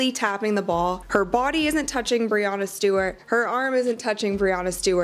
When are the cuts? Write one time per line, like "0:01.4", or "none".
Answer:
none